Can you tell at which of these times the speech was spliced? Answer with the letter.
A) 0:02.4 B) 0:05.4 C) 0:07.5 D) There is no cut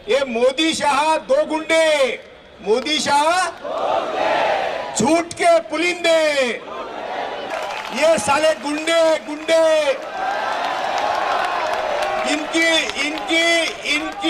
C